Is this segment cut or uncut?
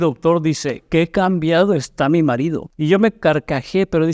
cut